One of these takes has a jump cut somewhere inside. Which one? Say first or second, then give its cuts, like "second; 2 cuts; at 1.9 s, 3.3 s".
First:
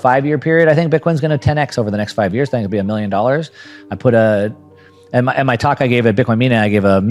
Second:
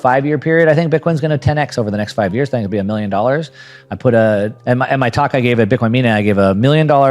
second; 1 cut; at 4.6 s